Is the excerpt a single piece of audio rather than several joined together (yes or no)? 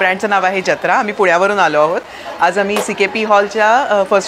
yes